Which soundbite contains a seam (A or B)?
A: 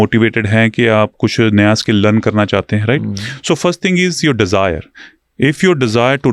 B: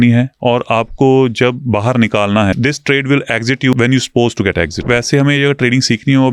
B